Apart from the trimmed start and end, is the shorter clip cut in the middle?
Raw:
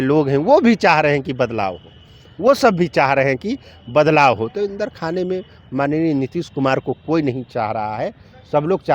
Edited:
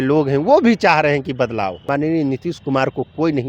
yes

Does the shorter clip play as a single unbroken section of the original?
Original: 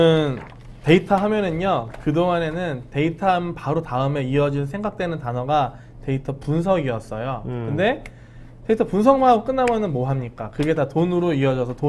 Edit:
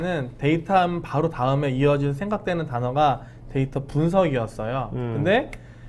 yes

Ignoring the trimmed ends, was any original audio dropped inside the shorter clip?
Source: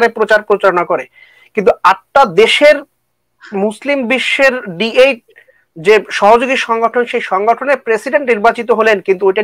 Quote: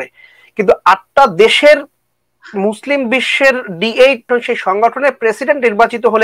yes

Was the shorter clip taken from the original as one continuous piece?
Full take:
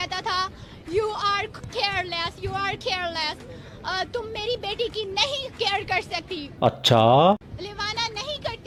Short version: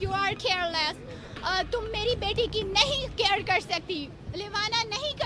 no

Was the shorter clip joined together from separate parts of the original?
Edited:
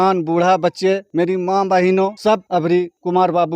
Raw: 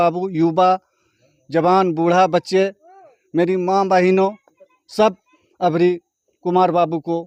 yes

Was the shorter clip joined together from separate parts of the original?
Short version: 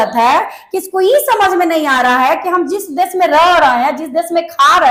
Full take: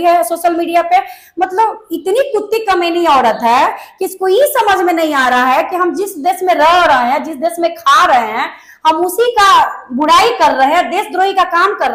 no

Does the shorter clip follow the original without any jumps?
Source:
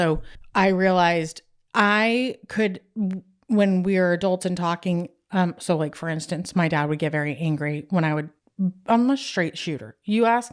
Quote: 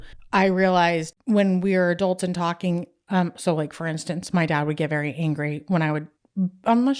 no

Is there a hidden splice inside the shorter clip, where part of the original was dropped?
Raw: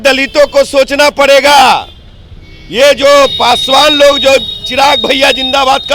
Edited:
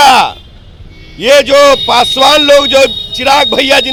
no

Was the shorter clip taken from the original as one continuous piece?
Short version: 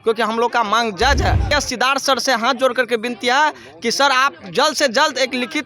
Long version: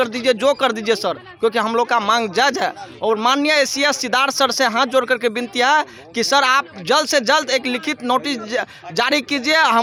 no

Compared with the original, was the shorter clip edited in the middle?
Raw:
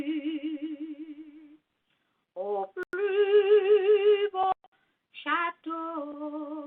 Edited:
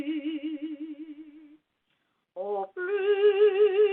yes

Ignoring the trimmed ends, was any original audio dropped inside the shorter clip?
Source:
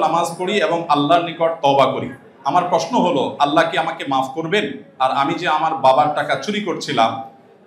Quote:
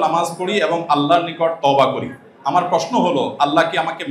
no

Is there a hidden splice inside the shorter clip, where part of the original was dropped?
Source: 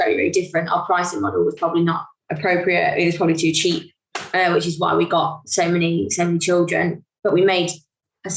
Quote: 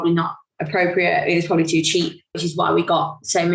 yes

